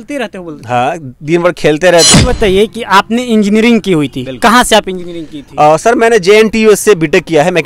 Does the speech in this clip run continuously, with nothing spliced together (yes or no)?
no